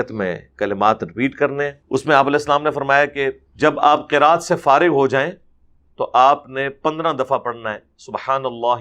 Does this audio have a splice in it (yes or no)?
yes